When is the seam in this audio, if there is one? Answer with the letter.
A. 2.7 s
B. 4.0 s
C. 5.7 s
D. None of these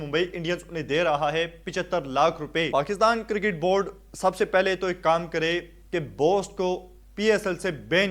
A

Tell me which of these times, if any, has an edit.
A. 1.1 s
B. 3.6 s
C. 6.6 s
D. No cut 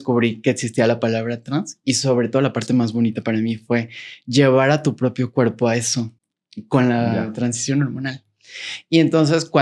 D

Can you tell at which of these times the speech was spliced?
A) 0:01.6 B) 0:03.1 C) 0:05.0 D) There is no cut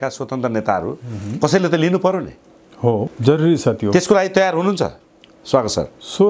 B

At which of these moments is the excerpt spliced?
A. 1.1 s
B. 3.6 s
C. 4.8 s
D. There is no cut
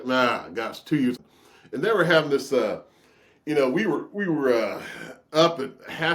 A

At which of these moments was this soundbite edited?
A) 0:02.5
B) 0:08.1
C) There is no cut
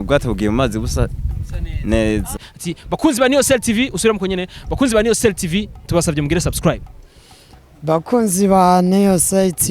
A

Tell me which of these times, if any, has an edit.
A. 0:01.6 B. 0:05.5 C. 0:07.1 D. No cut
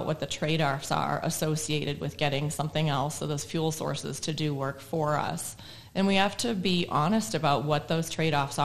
D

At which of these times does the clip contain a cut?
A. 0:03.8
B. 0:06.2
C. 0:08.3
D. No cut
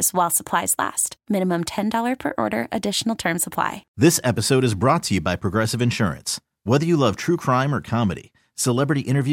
A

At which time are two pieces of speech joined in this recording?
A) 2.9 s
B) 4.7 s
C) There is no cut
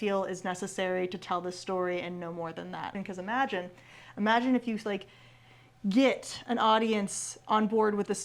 A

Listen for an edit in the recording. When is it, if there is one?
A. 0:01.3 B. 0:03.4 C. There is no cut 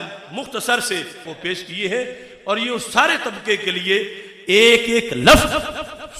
A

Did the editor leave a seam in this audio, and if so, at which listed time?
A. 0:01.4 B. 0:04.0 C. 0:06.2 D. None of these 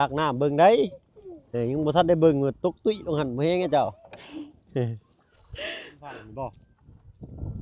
C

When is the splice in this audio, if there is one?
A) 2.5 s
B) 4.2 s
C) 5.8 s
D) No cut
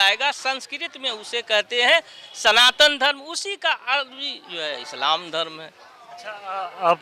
D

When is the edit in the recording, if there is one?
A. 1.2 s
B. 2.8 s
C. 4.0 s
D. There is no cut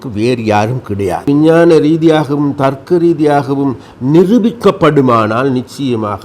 A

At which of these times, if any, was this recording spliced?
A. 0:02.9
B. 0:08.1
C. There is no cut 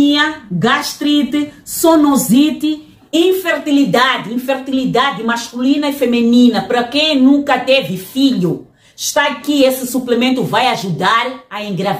C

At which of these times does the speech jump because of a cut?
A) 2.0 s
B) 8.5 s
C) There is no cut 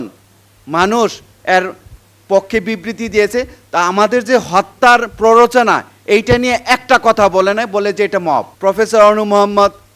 B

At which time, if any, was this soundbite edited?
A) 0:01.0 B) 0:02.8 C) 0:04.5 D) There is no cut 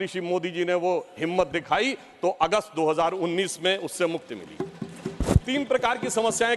D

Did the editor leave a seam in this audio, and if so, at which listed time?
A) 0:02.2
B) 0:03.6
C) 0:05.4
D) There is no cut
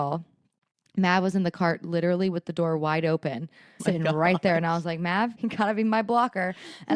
C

